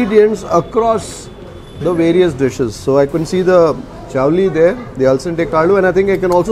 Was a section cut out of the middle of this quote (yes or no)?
no